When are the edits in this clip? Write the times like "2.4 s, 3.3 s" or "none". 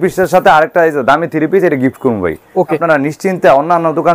2.8 s